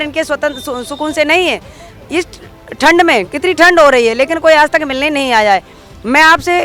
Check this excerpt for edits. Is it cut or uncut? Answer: uncut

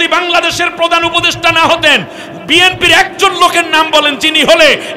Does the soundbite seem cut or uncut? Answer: uncut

